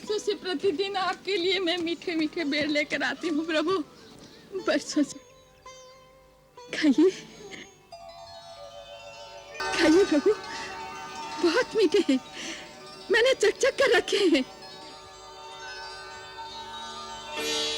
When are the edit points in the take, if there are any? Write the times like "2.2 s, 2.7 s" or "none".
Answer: 9.6 s